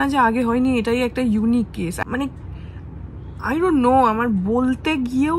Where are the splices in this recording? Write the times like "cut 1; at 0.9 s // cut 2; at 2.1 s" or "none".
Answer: cut 1; at 2.0 s